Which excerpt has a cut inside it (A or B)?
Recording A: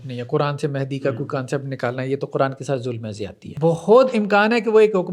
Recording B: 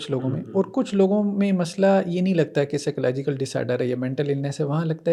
A